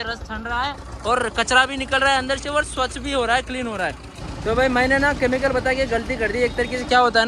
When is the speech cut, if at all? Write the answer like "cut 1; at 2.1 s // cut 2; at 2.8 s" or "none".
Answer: cut 1; at 4.2 s